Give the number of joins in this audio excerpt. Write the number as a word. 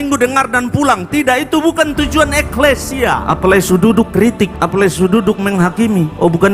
two